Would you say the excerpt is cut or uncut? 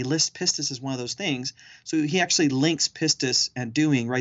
uncut